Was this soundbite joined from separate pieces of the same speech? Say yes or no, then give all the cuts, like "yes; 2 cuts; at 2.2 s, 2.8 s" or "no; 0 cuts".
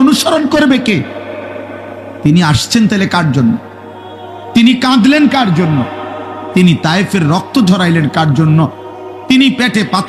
no; 0 cuts